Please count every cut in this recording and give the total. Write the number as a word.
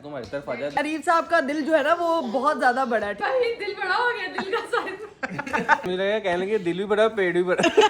three